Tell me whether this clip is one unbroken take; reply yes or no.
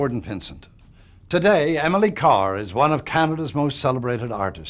no